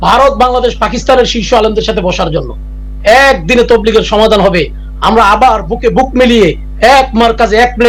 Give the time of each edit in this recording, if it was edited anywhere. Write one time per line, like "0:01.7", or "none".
none